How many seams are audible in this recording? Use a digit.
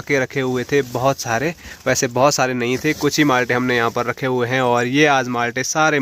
0